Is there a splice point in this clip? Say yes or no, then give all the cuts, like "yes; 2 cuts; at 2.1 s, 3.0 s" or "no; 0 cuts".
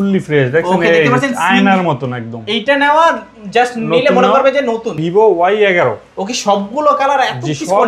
yes; 1 cut; at 5.0 s